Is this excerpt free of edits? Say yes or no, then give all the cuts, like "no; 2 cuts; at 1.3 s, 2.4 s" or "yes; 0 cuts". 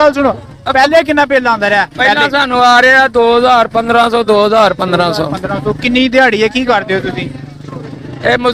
yes; 0 cuts